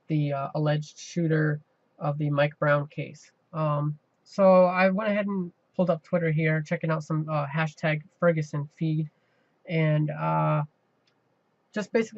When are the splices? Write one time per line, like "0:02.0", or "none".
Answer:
0:08.6